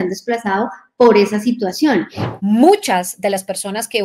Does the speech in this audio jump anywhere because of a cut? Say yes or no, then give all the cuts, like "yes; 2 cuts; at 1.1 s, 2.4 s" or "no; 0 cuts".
yes; 1 cut; at 2.2 s